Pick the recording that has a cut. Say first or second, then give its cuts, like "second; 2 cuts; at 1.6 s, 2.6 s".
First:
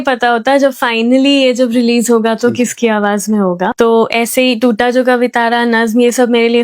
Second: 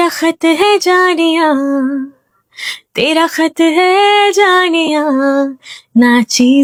first; 1 cut; at 3.7 s